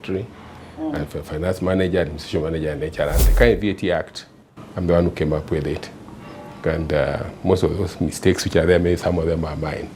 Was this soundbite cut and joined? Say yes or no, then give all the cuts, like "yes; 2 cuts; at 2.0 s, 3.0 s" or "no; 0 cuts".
yes; 1 cut; at 3.2 s